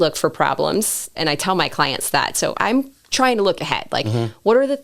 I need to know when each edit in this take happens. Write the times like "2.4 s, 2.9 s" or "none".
1.1 s, 2.6 s

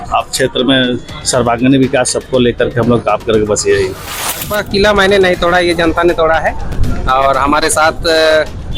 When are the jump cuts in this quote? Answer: 4.3 s

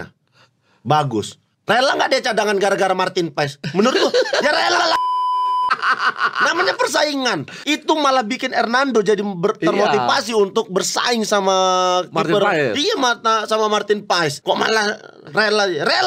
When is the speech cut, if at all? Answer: none

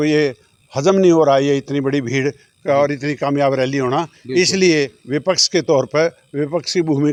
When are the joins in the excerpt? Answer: none

